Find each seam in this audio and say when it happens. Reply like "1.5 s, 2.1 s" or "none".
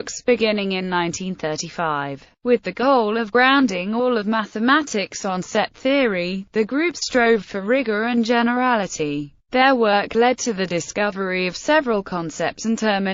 8.7 s

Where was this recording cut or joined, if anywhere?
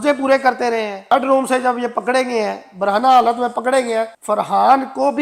1.1 s, 4.2 s

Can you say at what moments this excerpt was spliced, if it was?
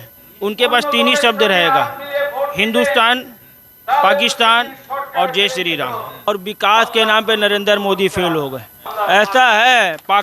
6.3 s, 8.8 s

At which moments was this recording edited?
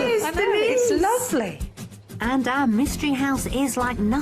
1.2 s

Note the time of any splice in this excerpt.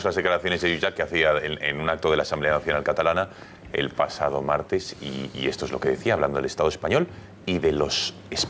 none

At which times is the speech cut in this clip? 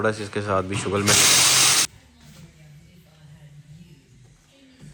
none

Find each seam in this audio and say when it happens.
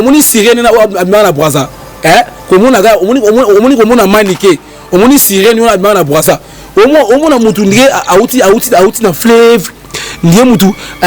none

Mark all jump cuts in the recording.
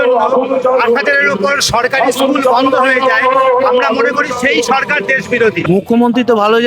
5.6 s

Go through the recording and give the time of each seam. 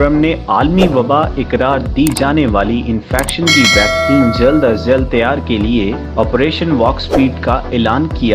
none

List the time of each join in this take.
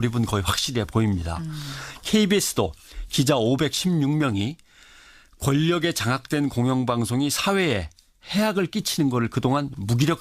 none

